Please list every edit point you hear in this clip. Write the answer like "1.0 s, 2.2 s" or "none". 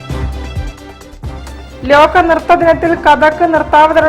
1.4 s